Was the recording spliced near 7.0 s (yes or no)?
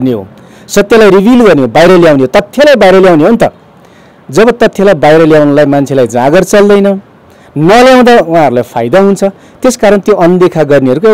no